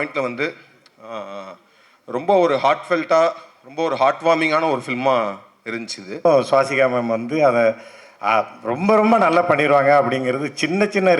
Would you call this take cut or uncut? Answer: cut